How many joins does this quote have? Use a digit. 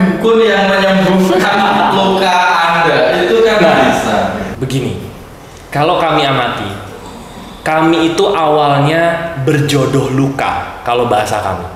1